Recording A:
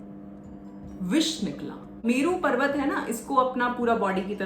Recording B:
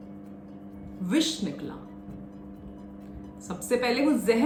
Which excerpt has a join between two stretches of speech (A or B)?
A